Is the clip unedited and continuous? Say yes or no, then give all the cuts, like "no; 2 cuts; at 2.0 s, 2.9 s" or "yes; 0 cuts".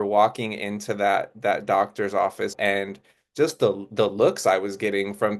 no; 1 cut; at 2.5 s